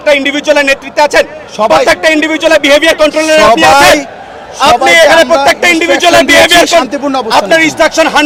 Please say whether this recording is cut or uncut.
uncut